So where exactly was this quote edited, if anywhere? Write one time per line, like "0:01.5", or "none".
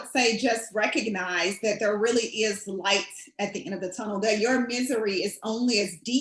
none